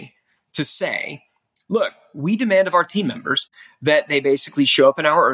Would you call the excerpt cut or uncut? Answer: uncut